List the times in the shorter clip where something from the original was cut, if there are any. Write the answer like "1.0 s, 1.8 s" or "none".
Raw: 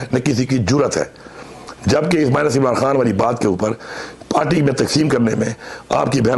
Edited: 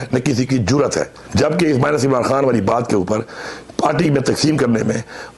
1.2 s